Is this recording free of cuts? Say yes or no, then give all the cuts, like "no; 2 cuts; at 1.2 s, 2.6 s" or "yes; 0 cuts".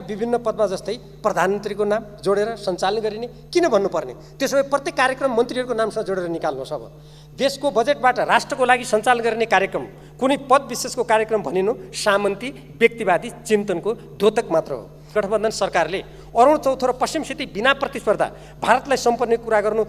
no; 1 cut; at 15.1 s